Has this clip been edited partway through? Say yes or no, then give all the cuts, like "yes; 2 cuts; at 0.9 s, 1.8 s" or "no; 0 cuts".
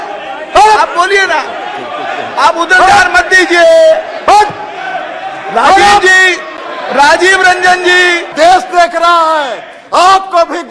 yes; 1 cut; at 8.3 s